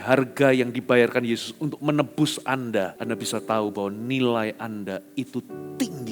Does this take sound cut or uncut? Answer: cut